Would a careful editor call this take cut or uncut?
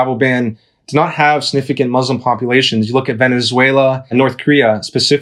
cut